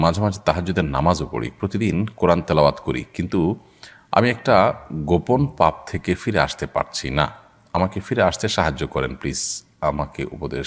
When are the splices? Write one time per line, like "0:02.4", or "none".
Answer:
none